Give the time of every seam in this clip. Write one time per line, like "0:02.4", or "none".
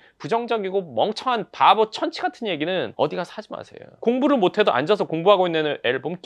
0:02.9
0:03.8

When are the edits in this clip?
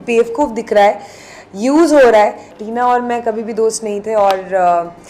0:02.5

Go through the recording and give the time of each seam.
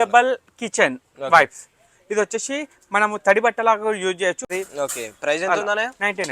0:04.5

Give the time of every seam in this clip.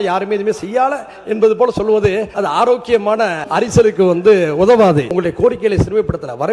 0:02.3
0:03.4
0:05.1

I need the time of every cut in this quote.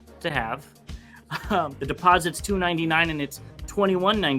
0:01.8

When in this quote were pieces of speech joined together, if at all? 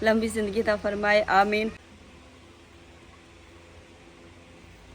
0:01.9

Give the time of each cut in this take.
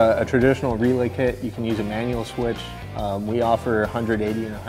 none

